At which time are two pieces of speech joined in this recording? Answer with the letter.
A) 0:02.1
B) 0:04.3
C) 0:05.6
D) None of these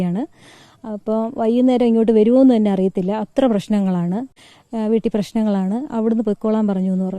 B